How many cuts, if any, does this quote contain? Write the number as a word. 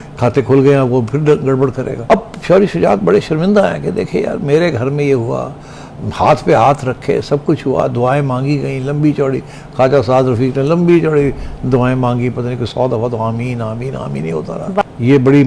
two